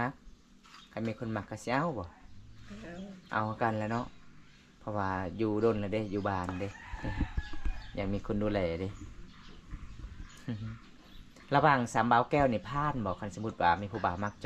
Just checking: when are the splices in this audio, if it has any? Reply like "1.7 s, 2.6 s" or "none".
none